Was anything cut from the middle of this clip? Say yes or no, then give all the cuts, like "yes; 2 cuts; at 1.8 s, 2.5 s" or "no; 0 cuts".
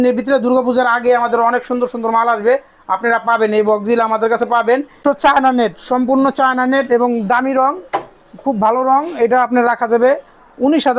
yes; 1 cut; at 5.0 s